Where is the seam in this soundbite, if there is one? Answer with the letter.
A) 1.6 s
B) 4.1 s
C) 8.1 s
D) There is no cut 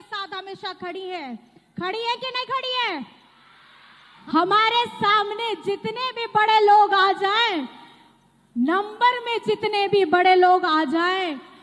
B